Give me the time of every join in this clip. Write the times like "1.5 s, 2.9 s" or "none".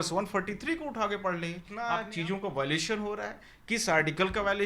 1.9 s